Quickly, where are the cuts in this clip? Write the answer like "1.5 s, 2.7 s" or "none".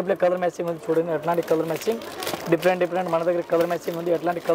none